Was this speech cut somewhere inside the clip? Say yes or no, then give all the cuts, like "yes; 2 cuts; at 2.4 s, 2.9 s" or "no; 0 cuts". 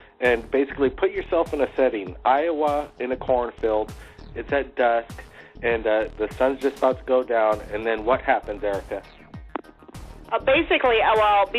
yes; 1 cut; at 10.3 s